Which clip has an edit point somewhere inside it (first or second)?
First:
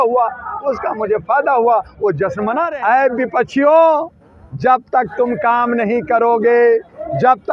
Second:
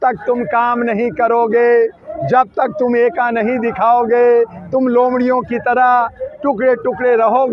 first